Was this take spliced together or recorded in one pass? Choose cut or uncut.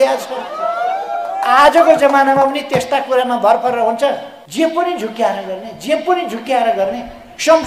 cut